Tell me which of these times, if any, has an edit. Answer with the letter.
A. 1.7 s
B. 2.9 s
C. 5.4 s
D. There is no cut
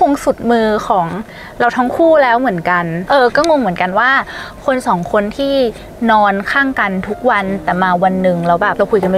B